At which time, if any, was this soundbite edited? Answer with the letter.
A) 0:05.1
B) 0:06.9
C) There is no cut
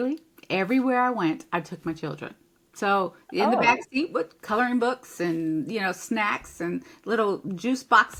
C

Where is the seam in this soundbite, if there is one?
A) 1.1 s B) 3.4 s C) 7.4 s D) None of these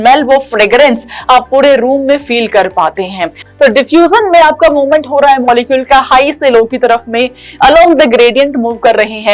B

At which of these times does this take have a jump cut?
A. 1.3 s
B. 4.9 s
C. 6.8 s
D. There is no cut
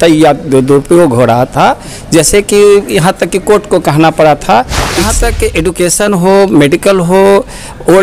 B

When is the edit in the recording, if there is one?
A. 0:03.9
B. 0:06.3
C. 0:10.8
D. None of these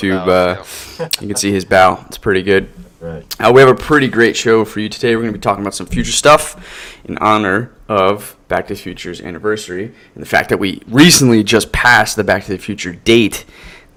D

